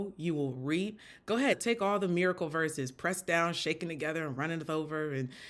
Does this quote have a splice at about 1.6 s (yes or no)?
yes